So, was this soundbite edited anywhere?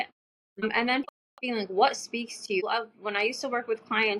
yes; 1 cut; at 1.1 s

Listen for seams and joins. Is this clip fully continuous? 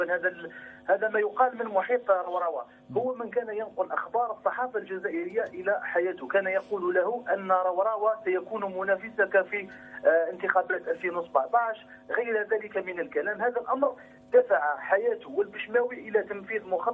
no; 1 cut; at 4.3 s

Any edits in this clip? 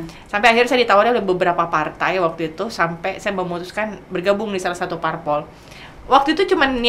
no; 0 cuts

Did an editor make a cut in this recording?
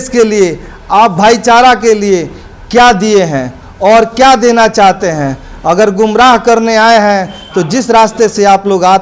no; 0 cuts

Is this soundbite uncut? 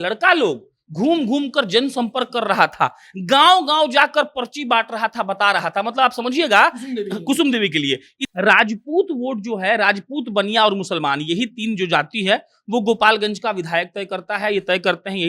no; 1 cut; at 8.2 s

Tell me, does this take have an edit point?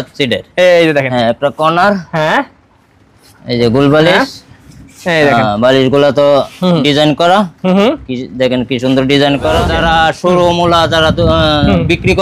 yes; 1 cut; at 9.7 s

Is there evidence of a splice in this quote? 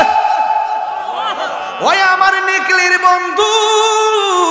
no; 0 cuts

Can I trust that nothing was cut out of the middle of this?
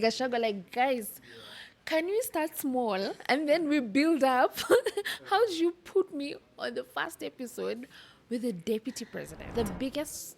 no; 1 cut; at 9.4 s

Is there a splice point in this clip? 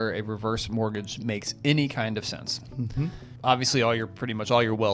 yes; 1 cut; at 3.3 s

